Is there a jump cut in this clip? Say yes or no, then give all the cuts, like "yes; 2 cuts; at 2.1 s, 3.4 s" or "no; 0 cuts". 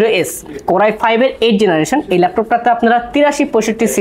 no; 0 cuts